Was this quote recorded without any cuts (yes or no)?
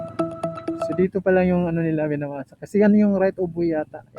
yes